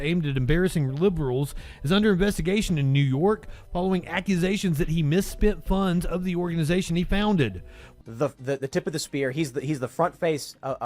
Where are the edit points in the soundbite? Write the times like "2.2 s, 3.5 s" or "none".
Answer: 7.9 s